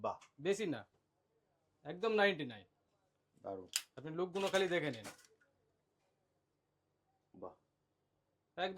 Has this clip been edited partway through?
no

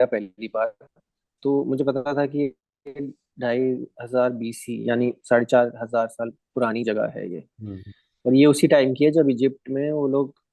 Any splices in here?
no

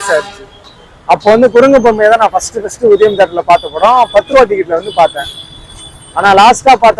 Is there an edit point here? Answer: no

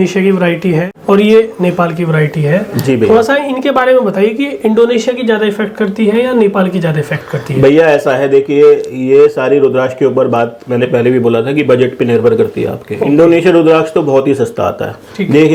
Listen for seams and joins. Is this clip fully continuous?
yes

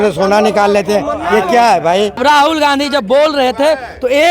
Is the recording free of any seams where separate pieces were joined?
no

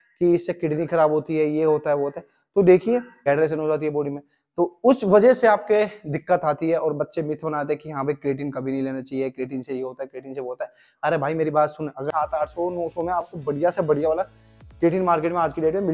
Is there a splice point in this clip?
yes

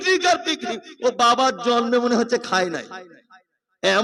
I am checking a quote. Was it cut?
no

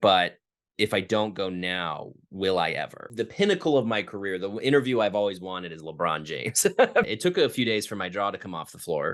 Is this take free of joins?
no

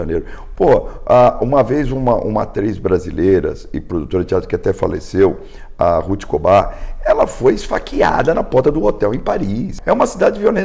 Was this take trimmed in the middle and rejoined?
yes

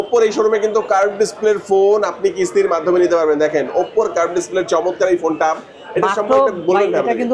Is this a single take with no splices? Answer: yes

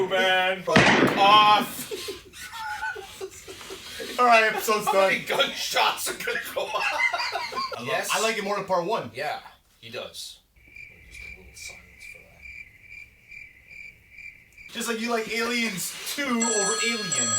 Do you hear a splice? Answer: yes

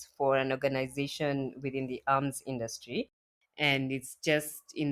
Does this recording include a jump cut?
yes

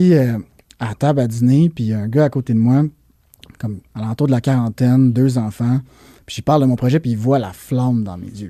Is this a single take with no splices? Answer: yes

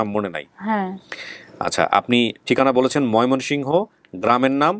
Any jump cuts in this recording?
no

